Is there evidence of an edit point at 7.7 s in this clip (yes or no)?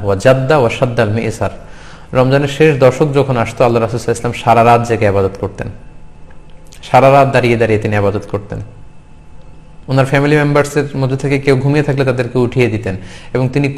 yes